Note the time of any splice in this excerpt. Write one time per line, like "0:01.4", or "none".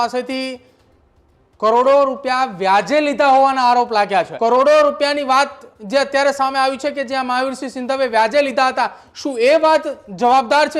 0:04.3